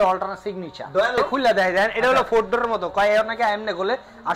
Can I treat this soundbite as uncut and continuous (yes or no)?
no